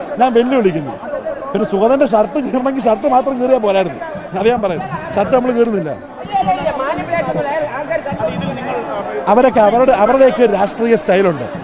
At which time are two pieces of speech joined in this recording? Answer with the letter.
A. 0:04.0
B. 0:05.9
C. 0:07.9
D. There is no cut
D